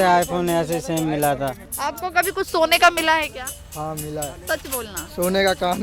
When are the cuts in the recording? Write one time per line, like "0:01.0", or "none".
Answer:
0:01.7